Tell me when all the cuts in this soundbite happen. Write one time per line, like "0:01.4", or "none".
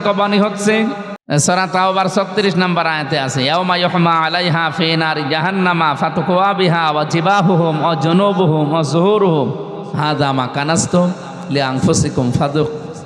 0:01.1